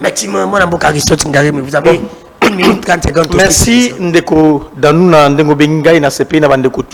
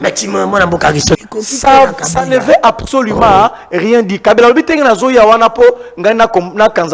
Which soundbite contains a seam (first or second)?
second